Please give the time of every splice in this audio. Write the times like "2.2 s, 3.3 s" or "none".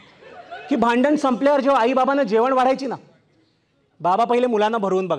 none